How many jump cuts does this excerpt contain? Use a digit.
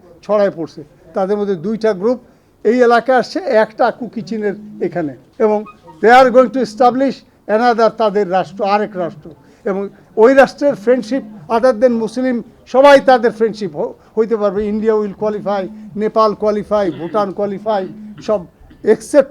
1